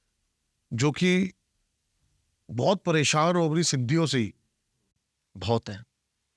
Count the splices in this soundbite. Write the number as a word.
zero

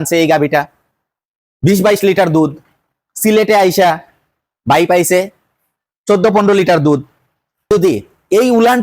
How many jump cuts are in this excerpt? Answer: one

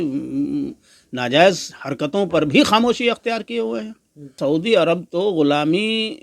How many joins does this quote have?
one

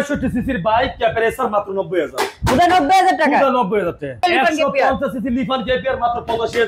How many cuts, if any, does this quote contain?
one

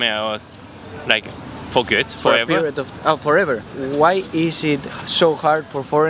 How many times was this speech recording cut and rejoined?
one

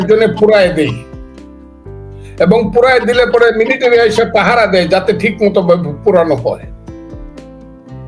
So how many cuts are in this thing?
two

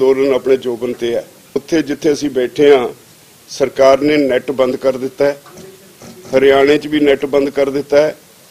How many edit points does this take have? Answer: one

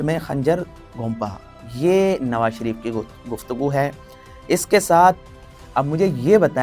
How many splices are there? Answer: zero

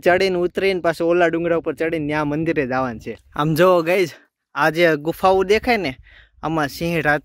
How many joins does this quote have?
one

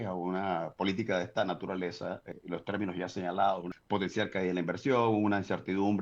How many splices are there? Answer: two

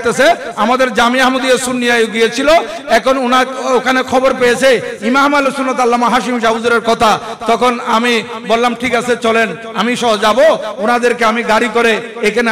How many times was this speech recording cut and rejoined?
one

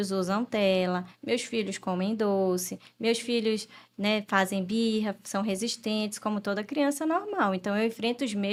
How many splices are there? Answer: zero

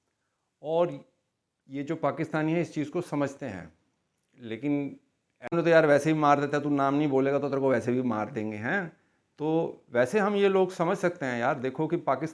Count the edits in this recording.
one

